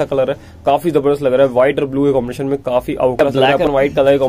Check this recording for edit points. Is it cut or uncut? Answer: cut